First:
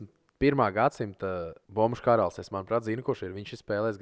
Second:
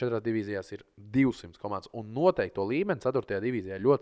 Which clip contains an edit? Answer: first; 1 cut; at 1.6 s

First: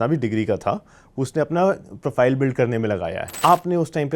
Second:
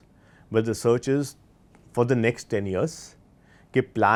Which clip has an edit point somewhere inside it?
first; 1 cut; at 3.2 s

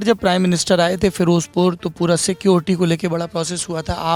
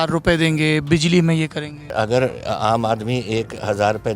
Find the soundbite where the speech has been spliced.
second; 1 cut; at 1.9 s

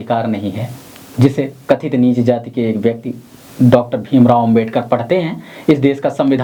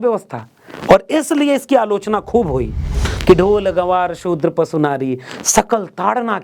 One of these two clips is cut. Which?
second; 1 cut; at 3.2 s

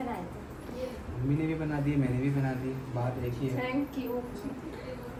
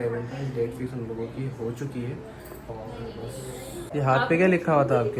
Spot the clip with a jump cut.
second; 1 cut; at 3.8 s

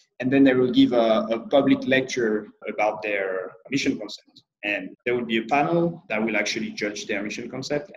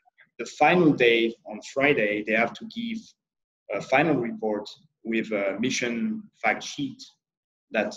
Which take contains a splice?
first; 4 cuts; at 2.6 s, 3.6 s, 4.9 s, 6.0 s

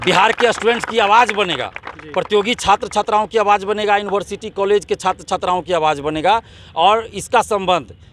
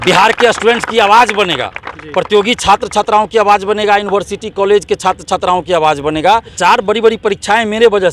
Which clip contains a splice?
second; 1 cut; at 6.5 s

